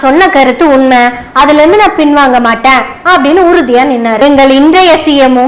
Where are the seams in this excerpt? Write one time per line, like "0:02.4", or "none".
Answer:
0:04.2